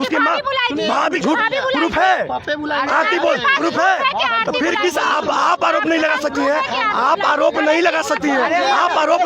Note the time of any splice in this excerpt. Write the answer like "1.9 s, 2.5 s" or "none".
1.1 s